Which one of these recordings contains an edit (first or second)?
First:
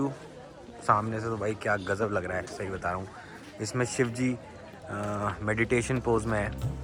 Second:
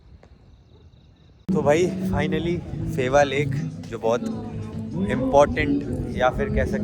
second